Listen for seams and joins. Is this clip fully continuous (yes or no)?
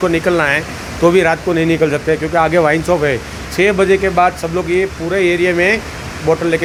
yes